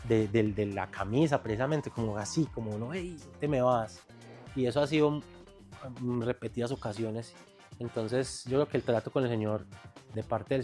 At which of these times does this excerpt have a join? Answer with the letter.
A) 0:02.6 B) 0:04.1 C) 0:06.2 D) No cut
D